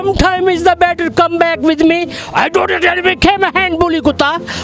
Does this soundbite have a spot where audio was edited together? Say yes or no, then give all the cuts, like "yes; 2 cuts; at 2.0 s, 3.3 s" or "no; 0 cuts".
no; 0 cuts